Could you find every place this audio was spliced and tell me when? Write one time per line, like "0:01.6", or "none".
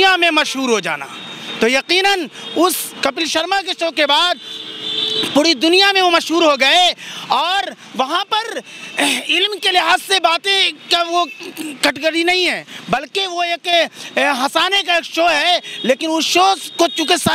none